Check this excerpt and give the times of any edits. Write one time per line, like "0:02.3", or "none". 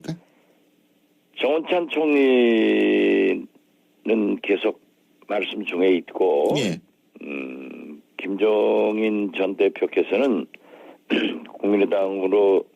0:07.6